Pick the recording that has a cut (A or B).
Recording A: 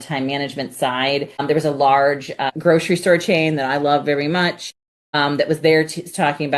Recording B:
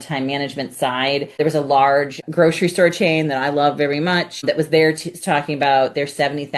B